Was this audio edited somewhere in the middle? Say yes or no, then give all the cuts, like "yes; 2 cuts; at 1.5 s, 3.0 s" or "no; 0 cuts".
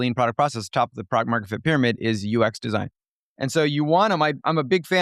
no; 0 cuts